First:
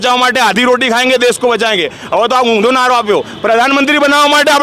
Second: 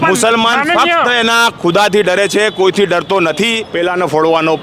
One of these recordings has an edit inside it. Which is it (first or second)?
second